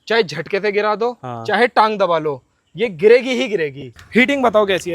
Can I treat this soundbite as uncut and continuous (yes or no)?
no